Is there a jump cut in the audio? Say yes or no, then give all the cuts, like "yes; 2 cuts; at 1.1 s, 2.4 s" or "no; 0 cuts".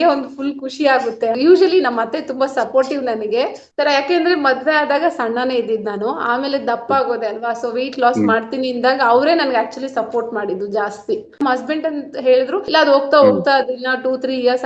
yes; 4 cuts; at 1.4 s, 3.6 s, 11.4 s, 12.6 s